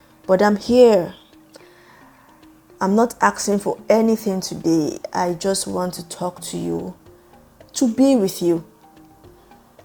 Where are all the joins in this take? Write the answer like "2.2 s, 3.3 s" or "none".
none